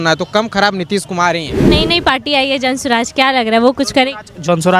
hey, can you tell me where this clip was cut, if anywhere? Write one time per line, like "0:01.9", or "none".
0:01.6